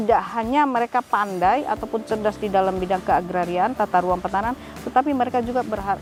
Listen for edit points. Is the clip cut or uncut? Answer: uncut